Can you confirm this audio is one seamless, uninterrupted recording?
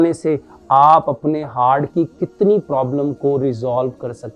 yes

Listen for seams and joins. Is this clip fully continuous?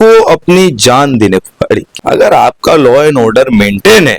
no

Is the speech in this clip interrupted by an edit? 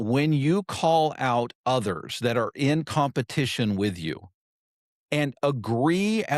no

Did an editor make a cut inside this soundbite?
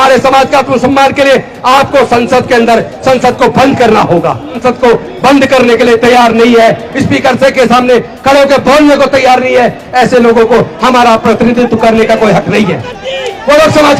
yes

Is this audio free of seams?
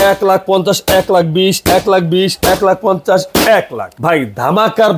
no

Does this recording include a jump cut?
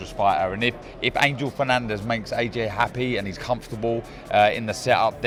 no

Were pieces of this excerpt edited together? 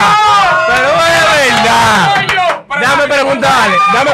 no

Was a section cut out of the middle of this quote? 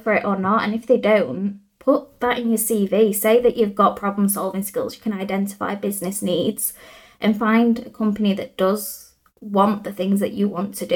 no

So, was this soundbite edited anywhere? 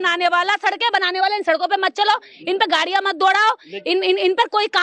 no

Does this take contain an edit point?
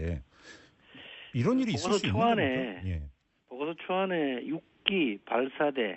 no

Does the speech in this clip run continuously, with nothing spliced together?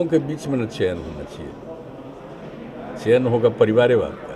yes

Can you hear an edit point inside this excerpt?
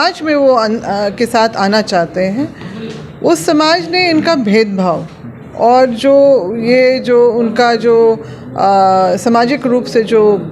no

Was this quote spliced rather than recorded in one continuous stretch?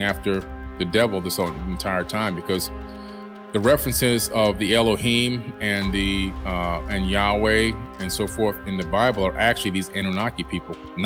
no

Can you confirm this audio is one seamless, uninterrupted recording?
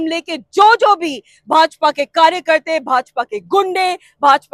yes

